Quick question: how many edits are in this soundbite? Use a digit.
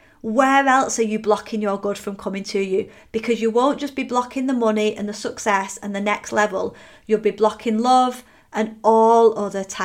0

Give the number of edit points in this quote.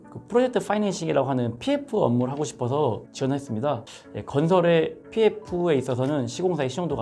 0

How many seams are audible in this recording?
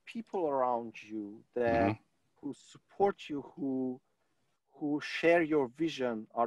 0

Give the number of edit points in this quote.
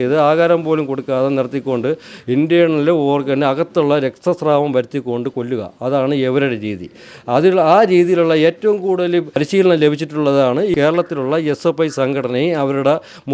2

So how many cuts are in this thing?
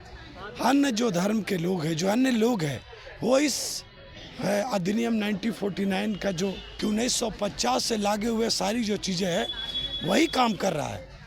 1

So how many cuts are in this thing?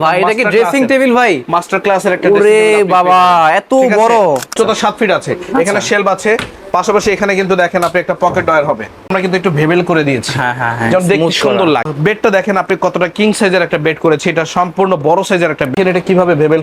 4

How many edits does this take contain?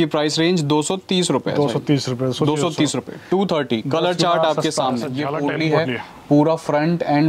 1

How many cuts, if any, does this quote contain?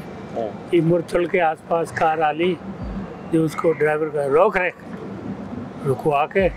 0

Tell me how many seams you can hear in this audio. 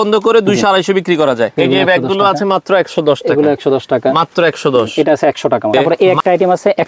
2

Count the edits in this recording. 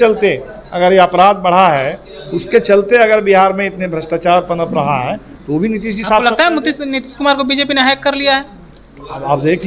0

